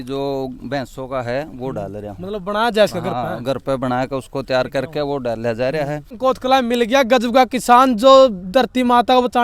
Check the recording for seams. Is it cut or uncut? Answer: cut